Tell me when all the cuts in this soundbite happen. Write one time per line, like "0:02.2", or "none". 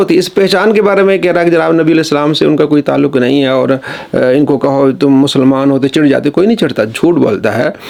none